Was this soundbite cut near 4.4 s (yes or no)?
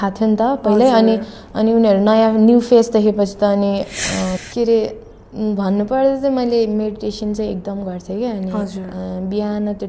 yes